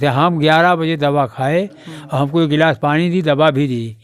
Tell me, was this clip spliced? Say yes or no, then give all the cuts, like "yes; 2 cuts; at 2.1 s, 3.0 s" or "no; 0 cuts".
no; 0 cuts